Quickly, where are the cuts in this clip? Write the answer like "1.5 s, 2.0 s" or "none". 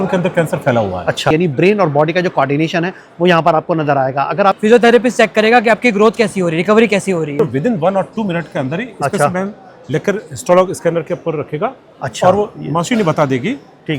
1.3 s, 4.6 s, 7.4 s